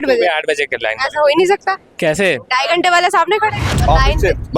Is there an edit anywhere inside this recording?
yes; 1 cut; at 3.7 s

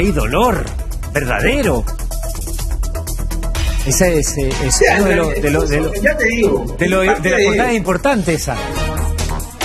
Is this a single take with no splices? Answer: yes; 0 cuts

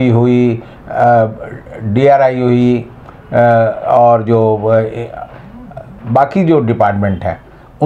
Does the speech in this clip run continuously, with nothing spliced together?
yes; 0 cuts

